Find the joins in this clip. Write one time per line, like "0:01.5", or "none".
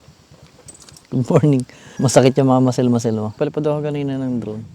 0:00.9
0:01.9
0:03.3